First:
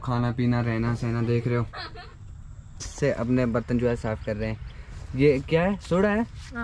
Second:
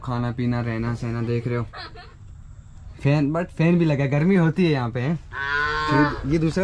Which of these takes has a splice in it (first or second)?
first